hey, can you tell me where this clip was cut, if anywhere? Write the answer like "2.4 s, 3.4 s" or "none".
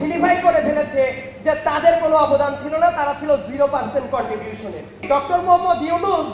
5.0 s